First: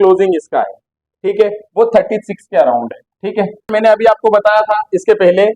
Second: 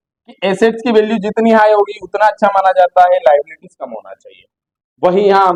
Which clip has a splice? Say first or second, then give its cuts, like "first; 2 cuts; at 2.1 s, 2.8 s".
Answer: first; 1 cut; at 3.7 s